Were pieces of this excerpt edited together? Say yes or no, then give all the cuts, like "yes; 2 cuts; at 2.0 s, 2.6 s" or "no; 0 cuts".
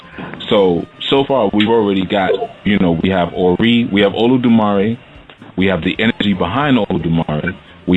yes; 1 cut; at 6.9 s